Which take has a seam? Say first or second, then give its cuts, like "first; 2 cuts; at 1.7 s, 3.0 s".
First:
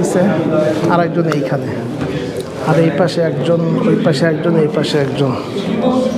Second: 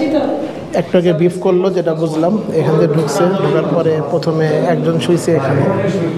first; 1 cut; at 2.0 s